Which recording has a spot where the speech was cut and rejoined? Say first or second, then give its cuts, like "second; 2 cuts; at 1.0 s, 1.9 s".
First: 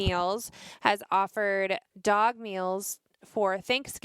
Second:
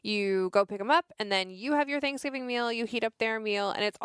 first; 1 cut; at 1.8 s